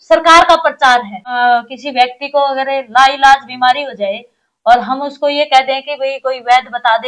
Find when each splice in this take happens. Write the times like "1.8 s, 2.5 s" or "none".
1.4 s